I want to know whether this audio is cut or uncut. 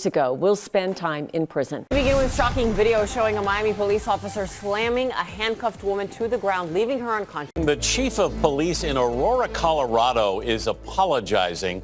cut